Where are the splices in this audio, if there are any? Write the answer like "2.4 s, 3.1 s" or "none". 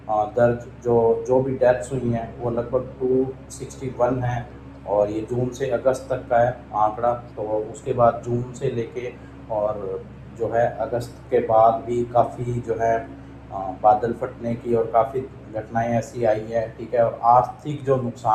none